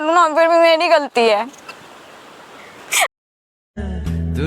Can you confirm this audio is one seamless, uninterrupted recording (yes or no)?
no